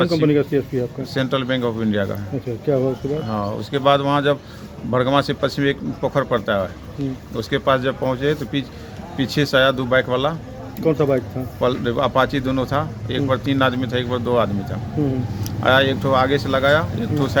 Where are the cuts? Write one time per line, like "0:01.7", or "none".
none